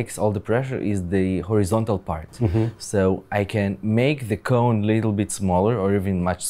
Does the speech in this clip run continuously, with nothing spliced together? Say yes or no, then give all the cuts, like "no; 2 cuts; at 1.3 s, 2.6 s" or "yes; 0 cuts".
yes; 0 cuts